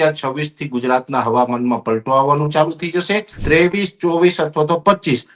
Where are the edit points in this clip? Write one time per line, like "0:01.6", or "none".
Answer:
0:03.4